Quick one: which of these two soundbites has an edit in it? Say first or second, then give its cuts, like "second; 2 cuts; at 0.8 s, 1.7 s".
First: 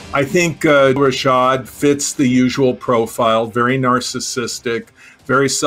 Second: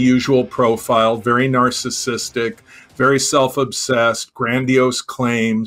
first; 1 cut; at 1.0 s